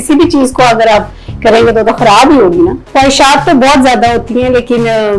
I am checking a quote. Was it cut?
yes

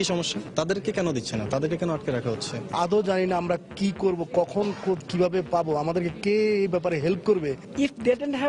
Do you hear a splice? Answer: yes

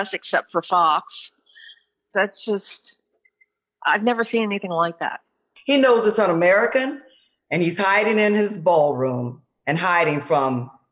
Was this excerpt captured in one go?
no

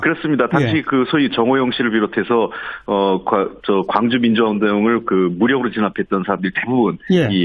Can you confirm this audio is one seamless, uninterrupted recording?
yes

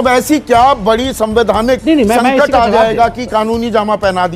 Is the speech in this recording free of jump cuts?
yes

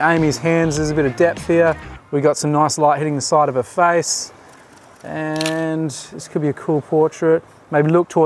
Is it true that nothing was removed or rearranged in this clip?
yes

